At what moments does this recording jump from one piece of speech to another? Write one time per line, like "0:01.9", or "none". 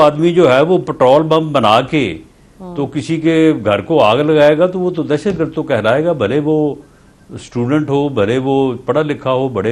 none